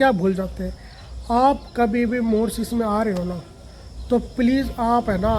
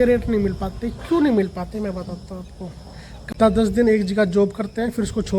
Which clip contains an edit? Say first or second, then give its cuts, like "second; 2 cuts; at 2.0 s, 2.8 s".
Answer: second; 1 cut; at 3.1 s